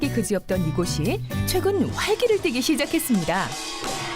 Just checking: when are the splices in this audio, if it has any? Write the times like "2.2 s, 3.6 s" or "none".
1.9 s